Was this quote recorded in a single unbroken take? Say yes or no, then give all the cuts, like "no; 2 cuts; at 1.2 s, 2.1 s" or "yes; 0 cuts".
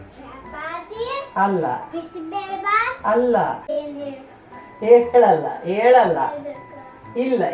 no; 1 cut; at 3.7 s